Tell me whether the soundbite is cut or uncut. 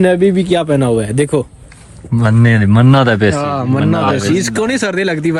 uncut